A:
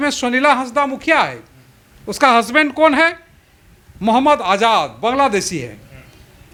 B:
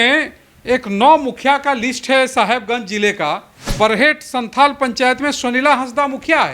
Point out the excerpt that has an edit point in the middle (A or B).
B